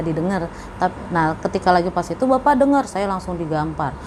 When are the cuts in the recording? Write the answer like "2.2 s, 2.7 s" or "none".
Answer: none